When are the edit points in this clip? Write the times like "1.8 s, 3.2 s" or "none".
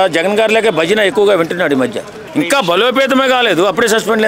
2.1 s